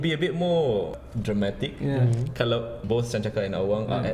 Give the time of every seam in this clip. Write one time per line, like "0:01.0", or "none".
0:02.8